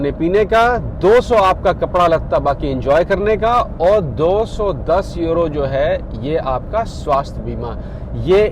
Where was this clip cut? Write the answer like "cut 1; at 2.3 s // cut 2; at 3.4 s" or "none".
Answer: none